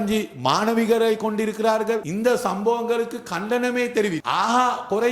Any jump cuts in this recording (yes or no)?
yes